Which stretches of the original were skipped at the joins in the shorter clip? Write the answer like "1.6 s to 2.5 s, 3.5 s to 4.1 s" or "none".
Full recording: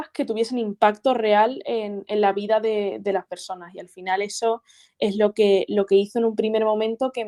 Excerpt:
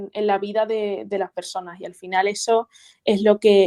none